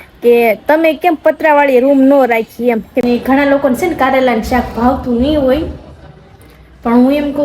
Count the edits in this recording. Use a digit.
1